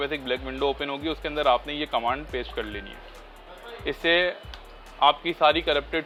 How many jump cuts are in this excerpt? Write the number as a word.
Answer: zero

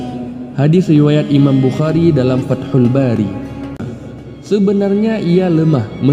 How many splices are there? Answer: one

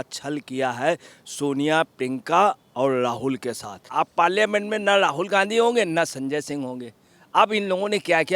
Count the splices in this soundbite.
one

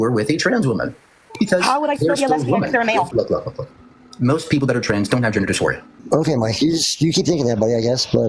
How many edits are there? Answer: two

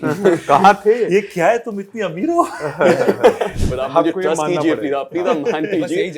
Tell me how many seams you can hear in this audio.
one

